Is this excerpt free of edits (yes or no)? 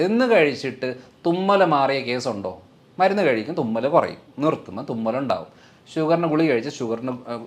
yes